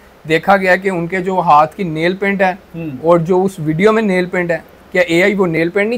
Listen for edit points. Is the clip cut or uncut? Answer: uncut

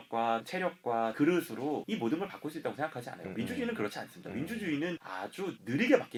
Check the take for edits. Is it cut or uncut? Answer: uncut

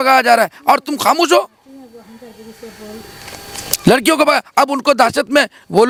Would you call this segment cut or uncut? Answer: uncut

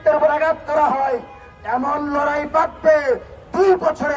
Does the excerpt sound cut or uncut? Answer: uncut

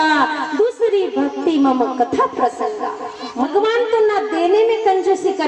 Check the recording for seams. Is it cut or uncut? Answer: cut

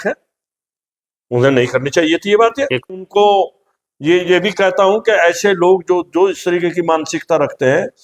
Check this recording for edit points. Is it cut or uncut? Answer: cut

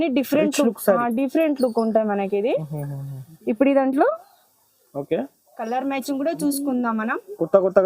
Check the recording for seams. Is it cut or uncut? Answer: uncut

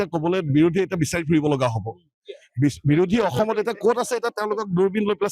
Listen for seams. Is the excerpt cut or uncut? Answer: uncut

